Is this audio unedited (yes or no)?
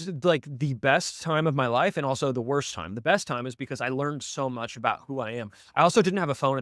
yes